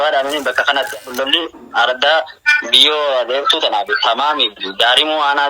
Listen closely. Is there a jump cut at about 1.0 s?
yes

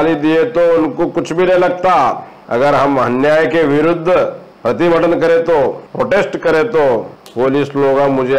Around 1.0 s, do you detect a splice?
no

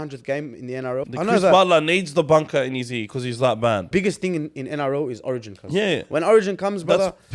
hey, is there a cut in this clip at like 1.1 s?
yes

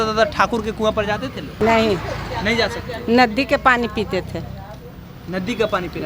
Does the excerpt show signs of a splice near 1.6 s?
yes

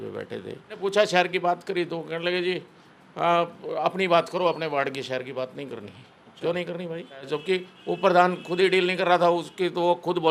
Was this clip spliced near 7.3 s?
yes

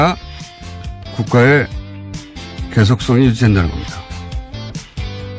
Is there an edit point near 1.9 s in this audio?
yes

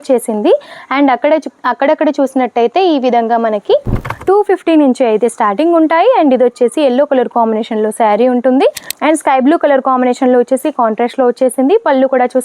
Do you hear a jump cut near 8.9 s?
yes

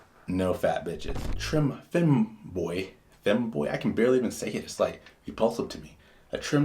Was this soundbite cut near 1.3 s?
yes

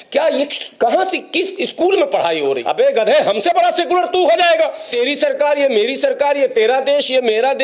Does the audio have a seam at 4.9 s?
yes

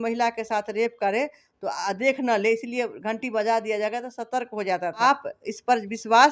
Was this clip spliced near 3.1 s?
no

